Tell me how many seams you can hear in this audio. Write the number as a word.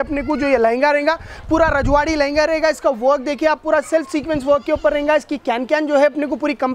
zero